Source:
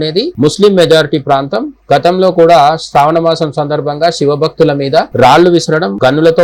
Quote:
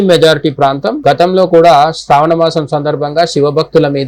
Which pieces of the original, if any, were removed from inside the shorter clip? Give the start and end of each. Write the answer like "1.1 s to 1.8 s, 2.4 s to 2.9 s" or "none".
1.6 s to 1.8 s